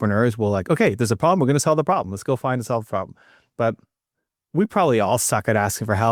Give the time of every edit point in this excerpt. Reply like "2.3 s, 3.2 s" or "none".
none